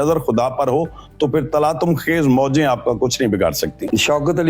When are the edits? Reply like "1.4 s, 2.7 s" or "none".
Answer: none